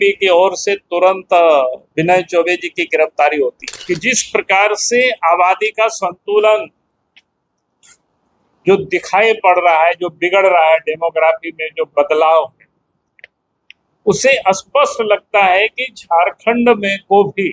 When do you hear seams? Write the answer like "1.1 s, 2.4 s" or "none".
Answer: 3.7 s